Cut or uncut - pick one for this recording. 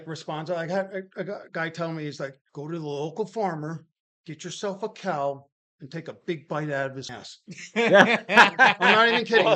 cut